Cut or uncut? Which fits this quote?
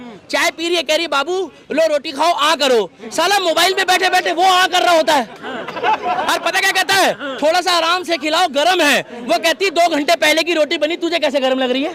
uncut